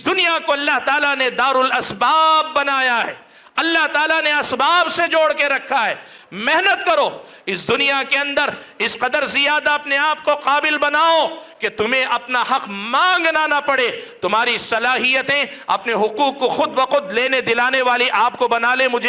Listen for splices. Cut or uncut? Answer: uncut